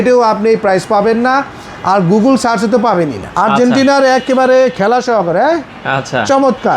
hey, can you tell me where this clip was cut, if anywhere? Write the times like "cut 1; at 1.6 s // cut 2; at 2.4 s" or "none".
cut 1; at 3.2 s

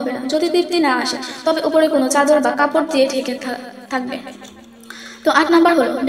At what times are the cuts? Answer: none

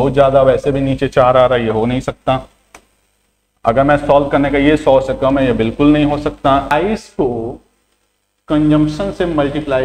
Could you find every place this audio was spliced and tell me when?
cut 1; at 6.7 s

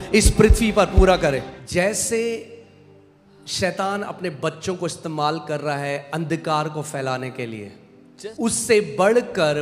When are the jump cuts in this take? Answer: cut 1; at 1.5 s // cut 2; at 8.1 s

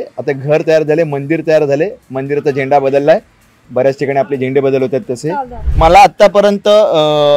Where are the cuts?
cut 1; at 5.6 s

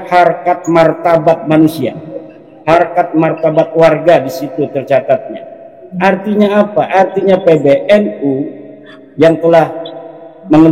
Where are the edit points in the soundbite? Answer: none

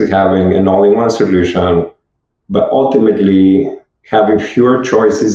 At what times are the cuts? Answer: none

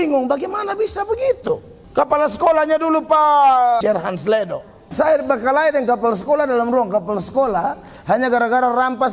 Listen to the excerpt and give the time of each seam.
cut 1; at 1.8 s // cut 2; at 3.8 s // cut 3; at 4.9 s

